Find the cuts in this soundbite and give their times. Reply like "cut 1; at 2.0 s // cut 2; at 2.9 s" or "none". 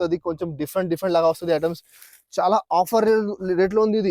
none